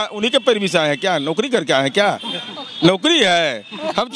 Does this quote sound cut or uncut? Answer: uncut